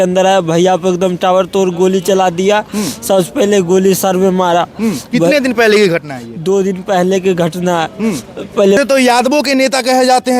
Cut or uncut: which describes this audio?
cut